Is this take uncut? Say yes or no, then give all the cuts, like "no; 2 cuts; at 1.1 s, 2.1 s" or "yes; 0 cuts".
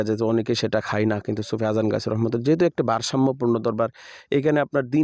yes; 0 cuts